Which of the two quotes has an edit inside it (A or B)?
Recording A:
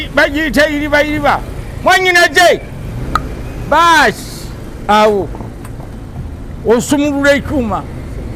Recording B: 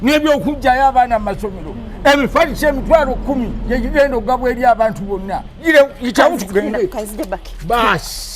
B